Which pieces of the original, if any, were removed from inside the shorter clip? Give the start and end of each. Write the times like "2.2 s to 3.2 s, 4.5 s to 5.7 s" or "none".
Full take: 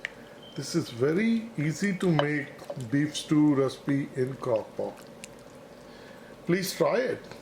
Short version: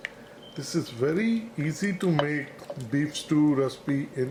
none